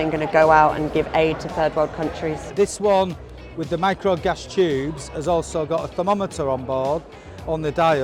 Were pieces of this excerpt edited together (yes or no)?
yes